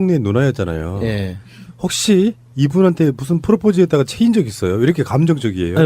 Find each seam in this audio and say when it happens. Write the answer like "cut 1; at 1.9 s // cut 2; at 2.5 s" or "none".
cut 1; at 2.0 s